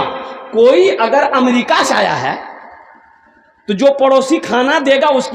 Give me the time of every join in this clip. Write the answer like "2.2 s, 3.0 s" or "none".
none

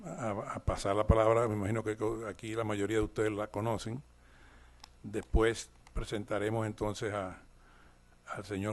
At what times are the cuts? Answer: 7.1 s

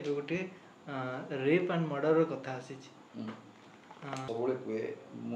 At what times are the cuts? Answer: 4.2 s

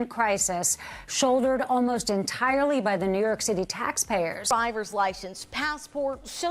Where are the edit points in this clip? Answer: 4.4 s

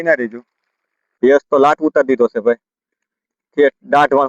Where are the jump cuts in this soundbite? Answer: 1.0 s

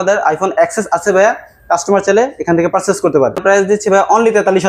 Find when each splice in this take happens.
3.4 s

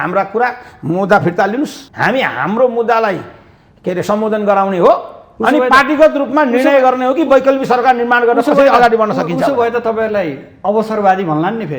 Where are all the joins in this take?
1.8 s

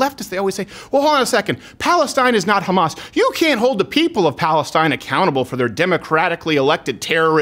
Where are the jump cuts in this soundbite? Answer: none

